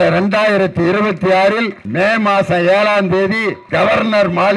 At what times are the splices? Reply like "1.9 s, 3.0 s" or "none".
1.8 s, 3.6 s